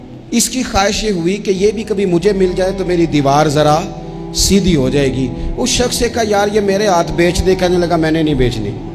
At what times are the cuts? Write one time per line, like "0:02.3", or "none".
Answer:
none